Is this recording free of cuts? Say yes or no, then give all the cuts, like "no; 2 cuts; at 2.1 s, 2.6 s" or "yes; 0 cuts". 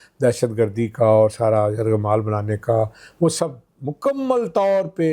yes; 0 cuts